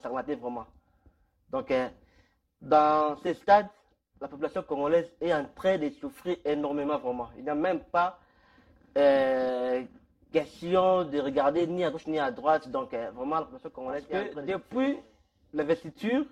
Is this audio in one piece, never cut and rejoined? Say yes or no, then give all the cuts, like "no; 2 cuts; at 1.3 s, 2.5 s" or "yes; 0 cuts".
no; 1 cut; at 14.4 s